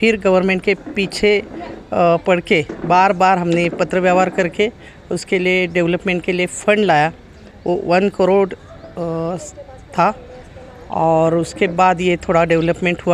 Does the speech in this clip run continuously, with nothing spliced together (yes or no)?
yes